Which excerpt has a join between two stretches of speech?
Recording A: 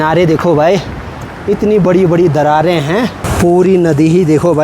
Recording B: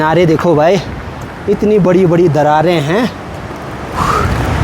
A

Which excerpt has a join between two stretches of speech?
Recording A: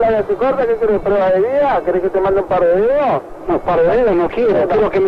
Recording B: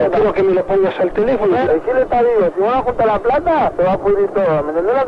B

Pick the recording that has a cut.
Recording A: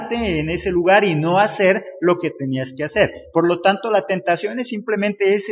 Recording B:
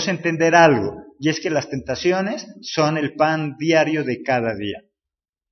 A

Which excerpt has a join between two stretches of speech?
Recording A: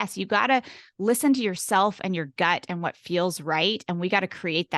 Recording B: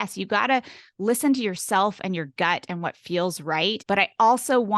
B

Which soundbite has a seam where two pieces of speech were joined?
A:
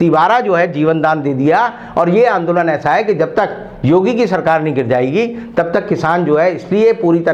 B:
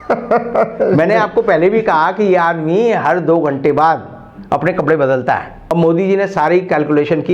B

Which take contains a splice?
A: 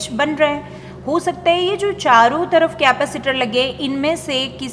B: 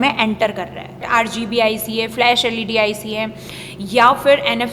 B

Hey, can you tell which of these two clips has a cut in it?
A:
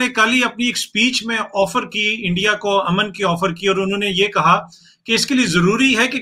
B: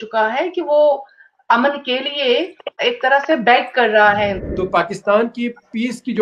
B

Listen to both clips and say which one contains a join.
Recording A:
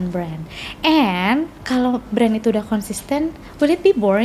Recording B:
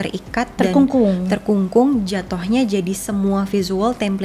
A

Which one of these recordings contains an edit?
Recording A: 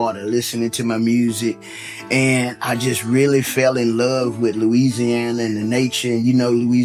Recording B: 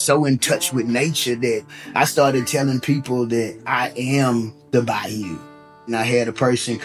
B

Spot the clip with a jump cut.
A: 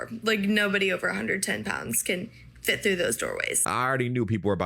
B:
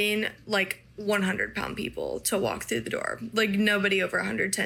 A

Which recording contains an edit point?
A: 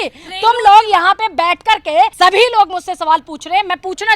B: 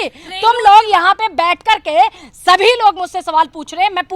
A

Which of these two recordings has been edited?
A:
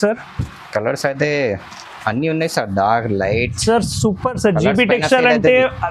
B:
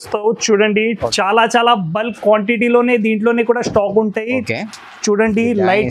B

